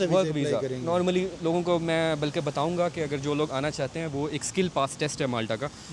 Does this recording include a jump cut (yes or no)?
no